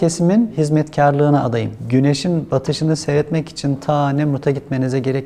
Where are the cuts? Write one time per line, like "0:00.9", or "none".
0:01.7